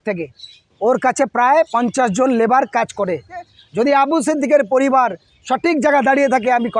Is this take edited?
yes; 1 cut; at 3.5 s

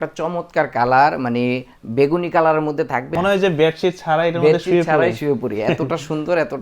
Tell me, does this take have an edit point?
yes; 1 cut; at 3.1 s

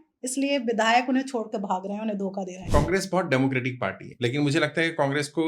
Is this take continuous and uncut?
no; 2 cuts; at 2.6 s, 4.1 s

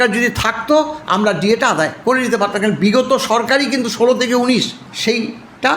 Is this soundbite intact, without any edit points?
no; 2 cuts; at 2.0 s, 4.8 s

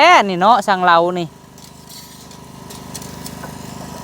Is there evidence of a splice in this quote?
no; 0 cuts

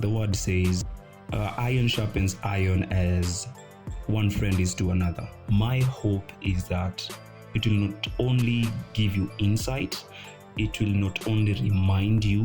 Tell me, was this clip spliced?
yes; 1 cut; at 5.3 s

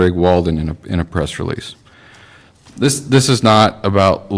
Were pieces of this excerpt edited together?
no; 0 cuts

